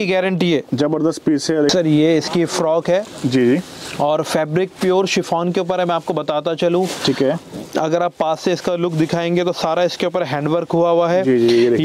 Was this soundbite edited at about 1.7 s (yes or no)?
yes